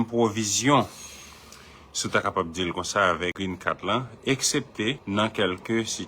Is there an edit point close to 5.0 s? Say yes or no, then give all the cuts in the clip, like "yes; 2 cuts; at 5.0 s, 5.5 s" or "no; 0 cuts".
yes; 2 cuts; at 3.4 s, 5.0 s